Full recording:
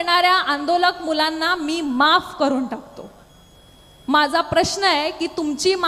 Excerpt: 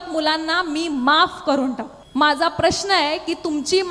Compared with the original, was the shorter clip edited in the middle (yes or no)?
yes